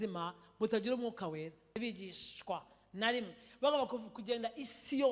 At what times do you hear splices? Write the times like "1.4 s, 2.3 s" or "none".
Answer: 1.8 s

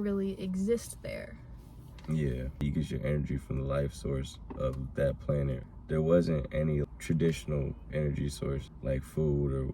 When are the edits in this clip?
2.6 s, 5.6 s, 6.8 s, 8.7 s

